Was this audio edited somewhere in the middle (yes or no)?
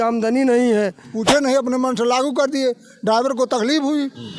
yes